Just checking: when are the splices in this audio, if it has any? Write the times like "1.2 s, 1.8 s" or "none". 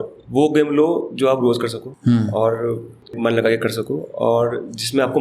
1.8 s, 3.1 s